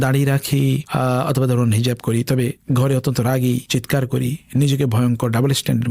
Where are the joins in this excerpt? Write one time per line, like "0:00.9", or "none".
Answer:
none